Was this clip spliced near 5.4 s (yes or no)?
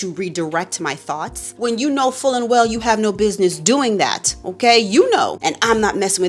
yes